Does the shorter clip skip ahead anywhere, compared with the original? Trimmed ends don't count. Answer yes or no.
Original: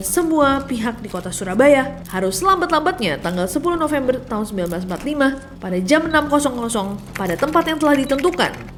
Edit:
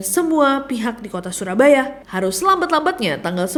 no